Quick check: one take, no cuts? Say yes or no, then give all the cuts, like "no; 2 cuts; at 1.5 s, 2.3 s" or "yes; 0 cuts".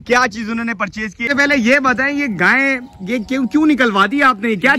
no; 1 cut; at 1.3 s